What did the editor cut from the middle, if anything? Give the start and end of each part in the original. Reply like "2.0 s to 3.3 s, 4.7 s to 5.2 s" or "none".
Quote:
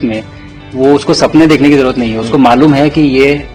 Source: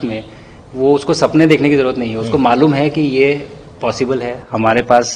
none